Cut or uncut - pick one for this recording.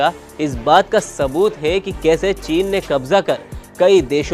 uncut